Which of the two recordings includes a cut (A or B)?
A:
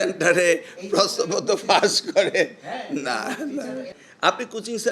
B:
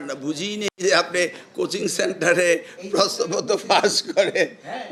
A